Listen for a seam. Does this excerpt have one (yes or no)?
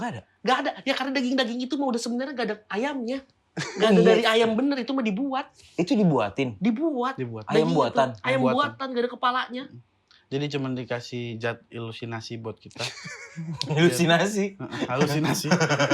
no